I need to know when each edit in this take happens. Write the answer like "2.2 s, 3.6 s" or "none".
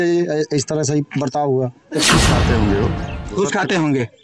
2.0 s